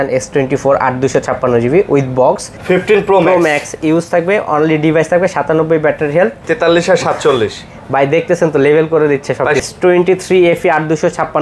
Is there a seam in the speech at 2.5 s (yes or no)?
yes